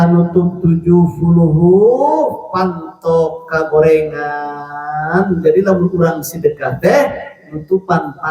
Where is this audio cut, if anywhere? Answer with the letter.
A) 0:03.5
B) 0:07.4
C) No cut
C